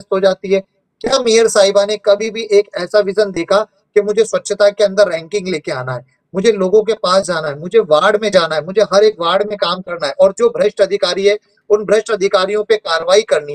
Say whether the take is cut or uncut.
uncut